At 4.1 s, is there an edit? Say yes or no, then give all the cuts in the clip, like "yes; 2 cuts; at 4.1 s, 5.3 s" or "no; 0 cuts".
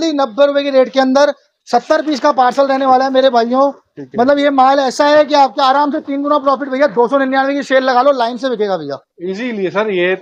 no; 0 cuts